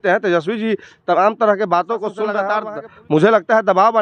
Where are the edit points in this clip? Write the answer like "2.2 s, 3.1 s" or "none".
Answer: 2.5 s

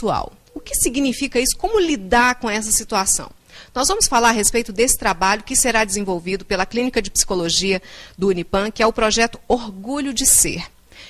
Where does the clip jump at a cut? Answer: 9.1 s

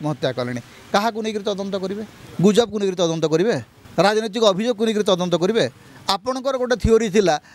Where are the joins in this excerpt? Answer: 2.2 s, 3.7 s

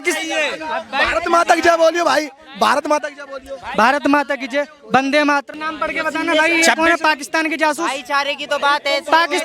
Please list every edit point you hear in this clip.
5.6 s

